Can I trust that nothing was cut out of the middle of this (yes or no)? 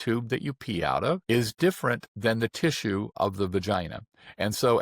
no